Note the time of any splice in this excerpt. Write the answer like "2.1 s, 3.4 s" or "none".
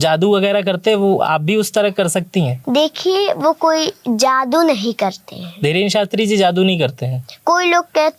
2.6 s